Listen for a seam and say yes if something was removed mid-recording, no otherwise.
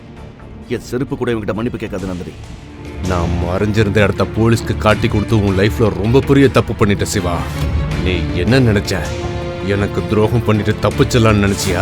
yes